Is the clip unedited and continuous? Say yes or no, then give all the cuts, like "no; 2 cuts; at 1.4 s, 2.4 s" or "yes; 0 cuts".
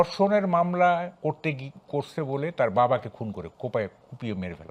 yes; 0 cuts